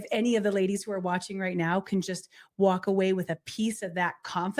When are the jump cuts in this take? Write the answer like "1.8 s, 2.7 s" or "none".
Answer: none